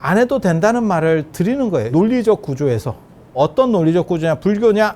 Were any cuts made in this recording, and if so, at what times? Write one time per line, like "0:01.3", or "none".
0:01.9
0:03.4